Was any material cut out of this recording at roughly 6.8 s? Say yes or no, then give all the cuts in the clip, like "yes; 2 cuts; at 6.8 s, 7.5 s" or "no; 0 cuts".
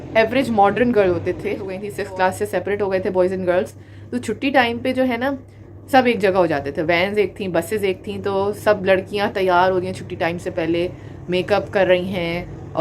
no; 1 cut; at 1.9 s